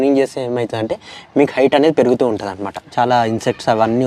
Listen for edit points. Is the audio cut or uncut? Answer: cut